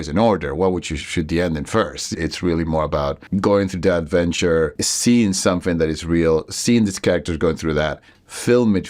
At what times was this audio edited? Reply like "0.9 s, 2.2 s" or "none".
2.1 s, 3.2 s, 4.9 s